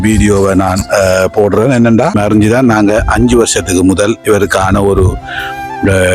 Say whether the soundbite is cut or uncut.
cut